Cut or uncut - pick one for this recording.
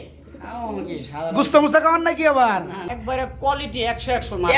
cut